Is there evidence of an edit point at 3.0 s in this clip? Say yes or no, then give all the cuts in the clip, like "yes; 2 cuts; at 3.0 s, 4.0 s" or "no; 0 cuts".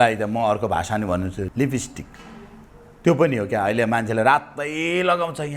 no; 1 cut; at 1.4 s